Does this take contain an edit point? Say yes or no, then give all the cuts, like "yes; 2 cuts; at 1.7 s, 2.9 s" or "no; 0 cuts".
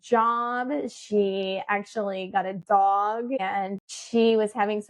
yes; 1 cut; at 3.5 s